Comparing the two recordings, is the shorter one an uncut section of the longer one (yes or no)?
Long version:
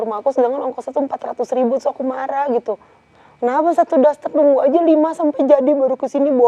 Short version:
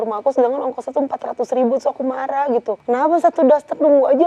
no